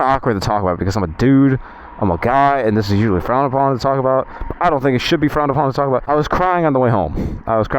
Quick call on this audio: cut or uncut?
cut